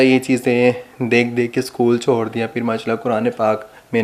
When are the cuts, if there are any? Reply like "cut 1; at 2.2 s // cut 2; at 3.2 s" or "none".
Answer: none